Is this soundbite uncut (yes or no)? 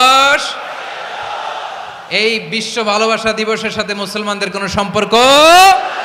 yes